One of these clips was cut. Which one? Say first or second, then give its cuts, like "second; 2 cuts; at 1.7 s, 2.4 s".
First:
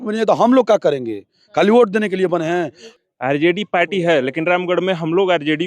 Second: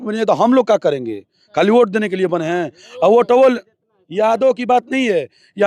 first; 1 cut; at 2.8 s